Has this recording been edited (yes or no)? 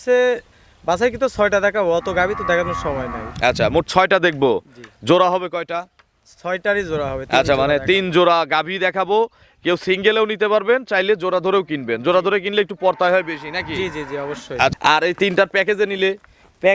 yes